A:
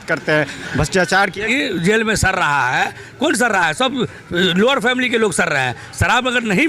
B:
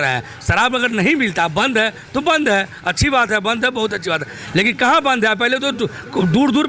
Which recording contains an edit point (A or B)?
A